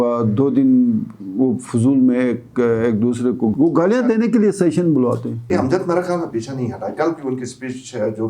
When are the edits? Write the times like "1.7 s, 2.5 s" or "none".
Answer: 3.5 s, 5.5 s